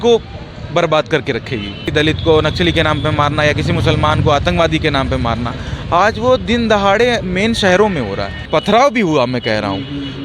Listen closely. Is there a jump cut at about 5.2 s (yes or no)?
no